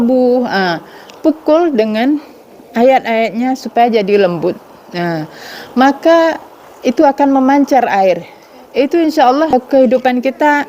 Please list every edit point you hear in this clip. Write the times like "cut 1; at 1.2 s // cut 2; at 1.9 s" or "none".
cut 1; at 9.5 s

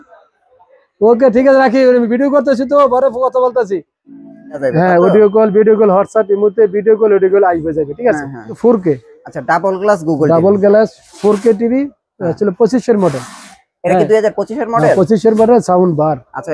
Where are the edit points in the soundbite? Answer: cut 1; at 4.7 s // cut 2; at 8.6 s

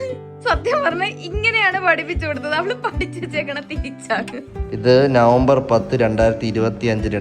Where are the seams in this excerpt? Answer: cut 1; at 4.5 s

